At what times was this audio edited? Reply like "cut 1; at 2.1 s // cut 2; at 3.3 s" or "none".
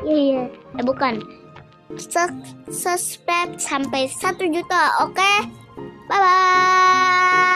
none